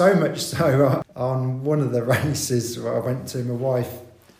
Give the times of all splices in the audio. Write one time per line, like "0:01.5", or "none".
0:01.0